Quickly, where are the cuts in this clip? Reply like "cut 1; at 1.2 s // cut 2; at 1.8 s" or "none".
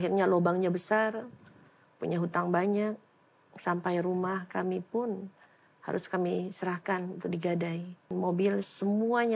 cut 1; at 8.1 s